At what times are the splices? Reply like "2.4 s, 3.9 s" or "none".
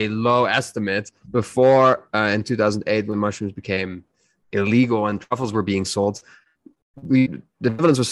none